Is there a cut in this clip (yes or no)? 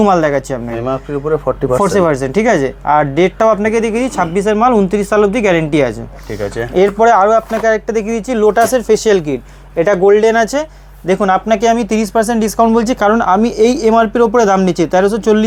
no